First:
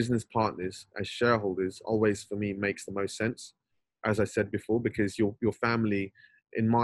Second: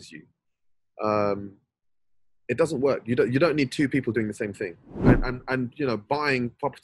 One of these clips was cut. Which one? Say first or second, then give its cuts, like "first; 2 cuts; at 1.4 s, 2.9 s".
second; 1 cut; at 4.9 s